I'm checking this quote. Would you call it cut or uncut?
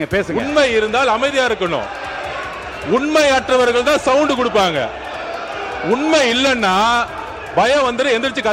uncut